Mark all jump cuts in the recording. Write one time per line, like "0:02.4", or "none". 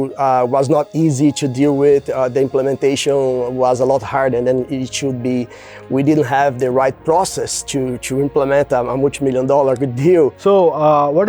0:10.4